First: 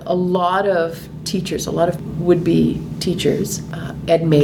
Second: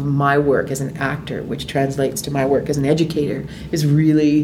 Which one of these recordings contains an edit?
first; 1 cut; at 2.0 s

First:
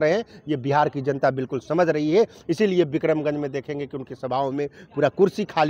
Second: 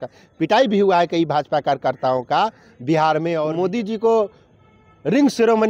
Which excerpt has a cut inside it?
second; 1 cut; at 3.5 s

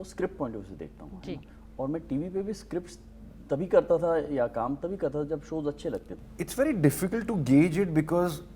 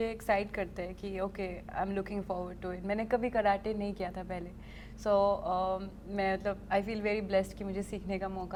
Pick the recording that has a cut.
first; 1 cut; at 6.2 s

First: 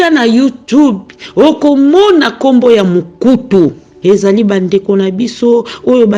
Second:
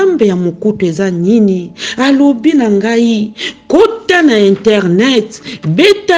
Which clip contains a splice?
first; 1 cut; at 3.9 s

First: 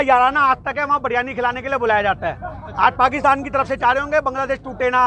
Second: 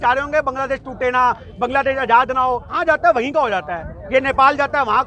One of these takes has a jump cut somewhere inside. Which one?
second; 1 cut; at 2.8 s

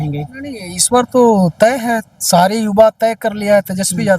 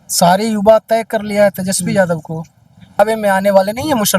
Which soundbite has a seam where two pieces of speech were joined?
second; 1 cut; at 3.0 s

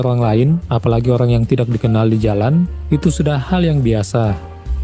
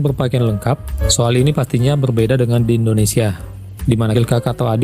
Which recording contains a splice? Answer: second; 2 cuts; at 0.9 s, 4.1 s

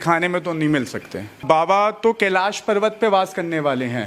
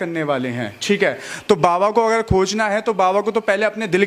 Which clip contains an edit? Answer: first; 1 cut; at 1.4 s

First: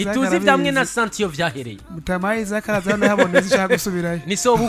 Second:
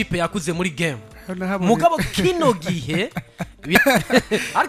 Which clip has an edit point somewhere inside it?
second; 1 cut; at 3.8 s

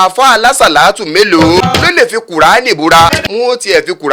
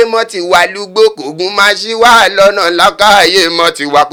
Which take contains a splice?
first; 2 cuts; at 1.6 s, 3.1 s

